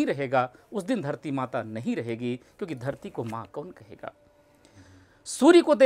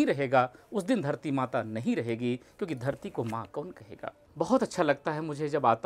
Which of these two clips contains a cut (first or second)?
second